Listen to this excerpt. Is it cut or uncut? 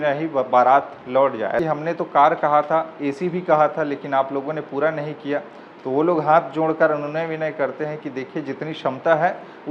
cut